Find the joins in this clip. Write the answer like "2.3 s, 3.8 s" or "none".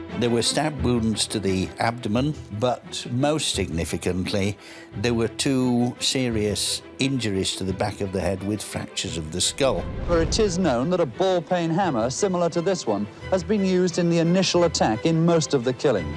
10.1 s